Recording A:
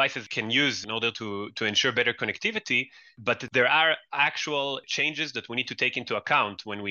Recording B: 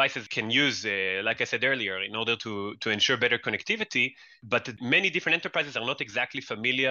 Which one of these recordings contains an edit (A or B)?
A